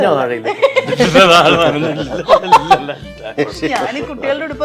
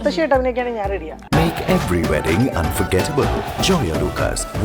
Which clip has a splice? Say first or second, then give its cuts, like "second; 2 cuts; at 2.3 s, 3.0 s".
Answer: second; 1 cut; at 1.2 s